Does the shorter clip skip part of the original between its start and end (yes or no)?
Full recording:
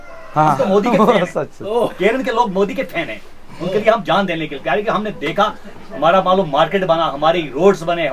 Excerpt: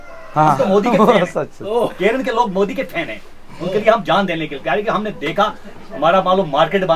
no